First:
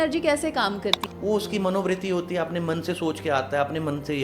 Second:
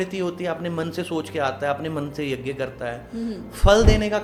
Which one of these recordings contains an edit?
first; 1 cut; at 1.0 s

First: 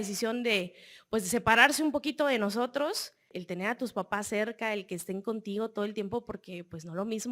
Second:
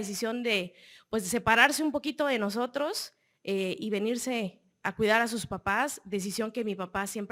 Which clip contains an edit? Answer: first; 1 cut; at 3.3 s

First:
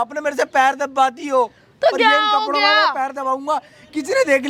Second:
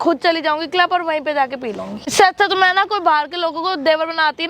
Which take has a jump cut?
second; 1 cut; at 2.0 s

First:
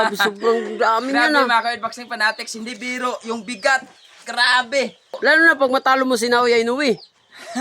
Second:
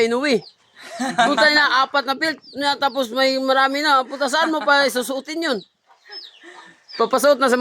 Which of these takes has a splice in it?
first; 1 cut; at 5.1 s

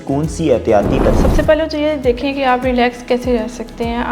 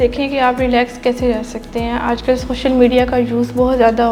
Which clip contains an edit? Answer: first; 1 cut; at 1.1 s

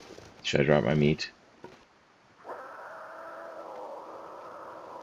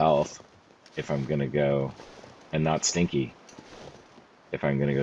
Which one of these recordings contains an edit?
first; 1 cut; at 1.8 s

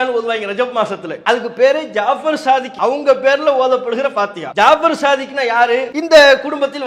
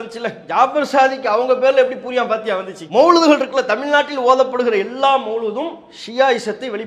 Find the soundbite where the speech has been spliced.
first; 4 cuts; at 1.1 s, 2.7 s, 4.4 s, 5.9 s

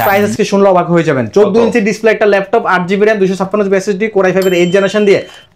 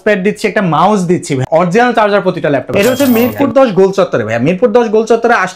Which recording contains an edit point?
second; 2 cuts; at 1.4 s, 2.7 s

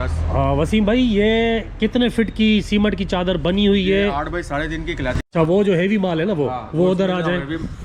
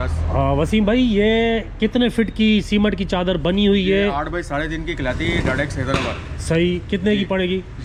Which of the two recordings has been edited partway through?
first; 1 cut; at 5.2 s

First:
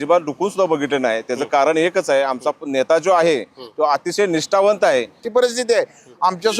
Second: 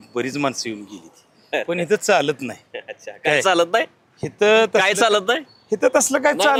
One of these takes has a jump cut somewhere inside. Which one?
first; 1 cut; at 5.2 s

